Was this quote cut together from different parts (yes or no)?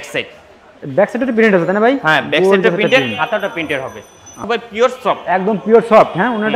yes